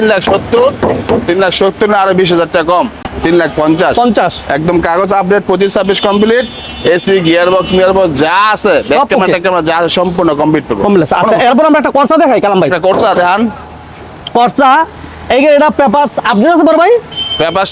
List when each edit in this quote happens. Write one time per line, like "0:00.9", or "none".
none